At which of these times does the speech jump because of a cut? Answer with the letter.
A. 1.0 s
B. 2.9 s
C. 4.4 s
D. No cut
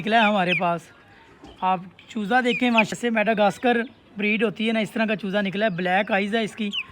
B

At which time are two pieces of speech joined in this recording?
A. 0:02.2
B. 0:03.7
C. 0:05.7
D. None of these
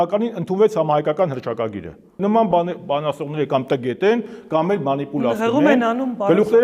A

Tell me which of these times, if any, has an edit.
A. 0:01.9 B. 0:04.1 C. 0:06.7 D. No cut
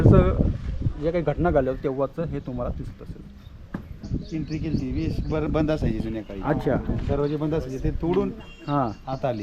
B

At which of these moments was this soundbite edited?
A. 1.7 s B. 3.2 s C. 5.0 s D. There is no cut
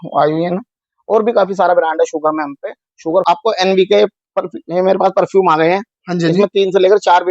B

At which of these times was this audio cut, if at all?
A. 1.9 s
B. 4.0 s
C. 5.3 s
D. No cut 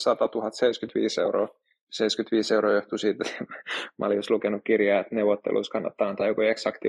D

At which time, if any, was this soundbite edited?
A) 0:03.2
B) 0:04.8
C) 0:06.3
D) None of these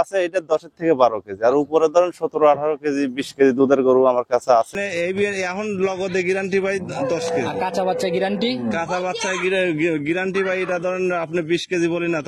B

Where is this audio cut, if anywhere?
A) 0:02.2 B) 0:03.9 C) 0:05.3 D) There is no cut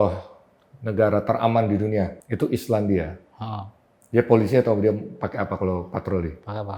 A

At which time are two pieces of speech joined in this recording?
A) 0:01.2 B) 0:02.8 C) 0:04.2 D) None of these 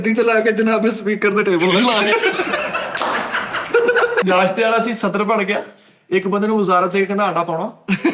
C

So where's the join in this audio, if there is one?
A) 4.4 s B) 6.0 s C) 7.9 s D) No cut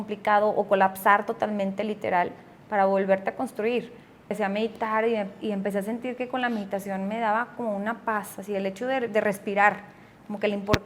A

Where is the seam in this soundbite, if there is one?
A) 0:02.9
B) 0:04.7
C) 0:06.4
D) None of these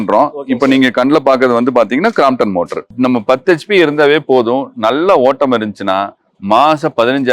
A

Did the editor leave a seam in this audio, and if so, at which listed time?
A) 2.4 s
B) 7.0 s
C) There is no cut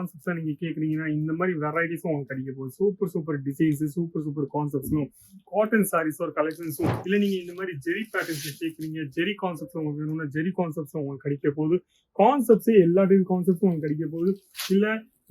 B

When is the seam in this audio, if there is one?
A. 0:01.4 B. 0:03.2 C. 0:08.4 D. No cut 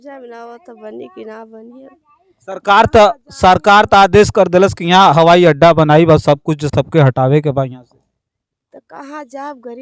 D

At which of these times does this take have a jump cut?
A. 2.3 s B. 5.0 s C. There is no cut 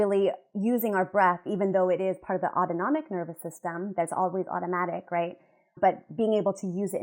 C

